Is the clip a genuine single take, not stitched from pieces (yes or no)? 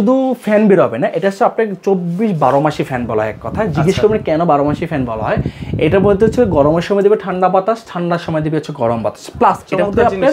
yes